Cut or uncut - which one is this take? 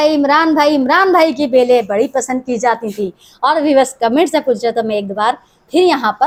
uncut